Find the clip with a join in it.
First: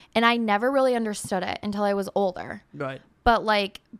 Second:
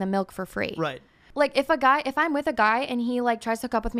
second; 1 cut; at 1.2 s

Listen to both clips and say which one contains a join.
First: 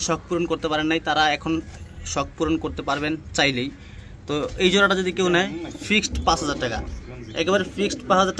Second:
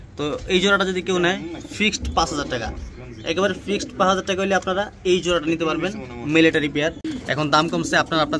second; 1 cut; at 7.1 s

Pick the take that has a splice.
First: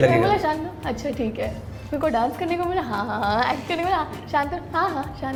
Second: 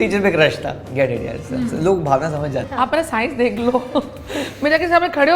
second; 1 cut; at 2.7 s

